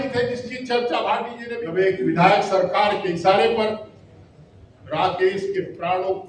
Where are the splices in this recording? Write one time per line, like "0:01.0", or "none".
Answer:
0:01.4